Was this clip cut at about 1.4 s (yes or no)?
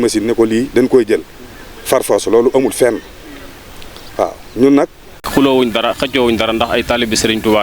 no